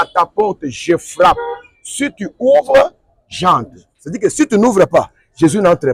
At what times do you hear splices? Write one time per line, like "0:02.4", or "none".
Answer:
none